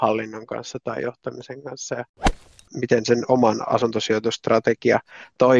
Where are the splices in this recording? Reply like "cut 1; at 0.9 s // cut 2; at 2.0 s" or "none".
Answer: cut 1; at 2.5 s